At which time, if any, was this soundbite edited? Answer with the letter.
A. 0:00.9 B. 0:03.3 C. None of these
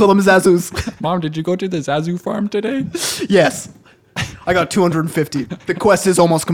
A